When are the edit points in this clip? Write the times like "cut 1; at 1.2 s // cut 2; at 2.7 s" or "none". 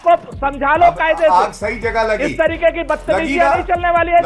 none